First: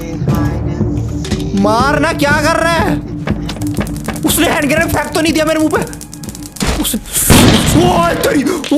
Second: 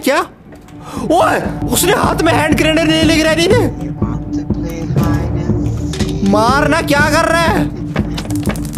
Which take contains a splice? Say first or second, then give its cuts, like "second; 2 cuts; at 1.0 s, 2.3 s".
second; 1 cut; at 1.6 s